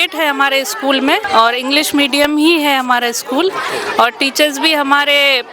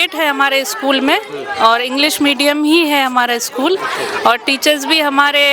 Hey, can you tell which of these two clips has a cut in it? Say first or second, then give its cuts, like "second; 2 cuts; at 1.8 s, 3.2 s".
first; 1 cut; at 1.2 s